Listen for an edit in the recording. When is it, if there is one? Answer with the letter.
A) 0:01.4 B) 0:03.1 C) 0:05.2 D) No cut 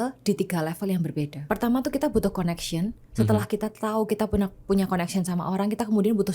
A